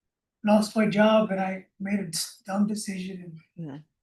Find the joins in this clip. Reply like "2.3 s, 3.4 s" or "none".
none